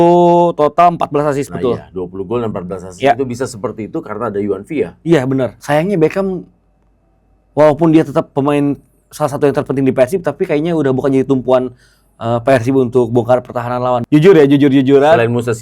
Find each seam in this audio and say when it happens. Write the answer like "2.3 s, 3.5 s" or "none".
5.6 s, 14.0 s